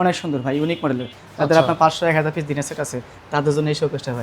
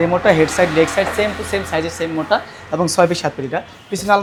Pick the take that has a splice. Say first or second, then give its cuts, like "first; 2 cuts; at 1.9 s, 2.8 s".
first; 1 cut; at 1.2 s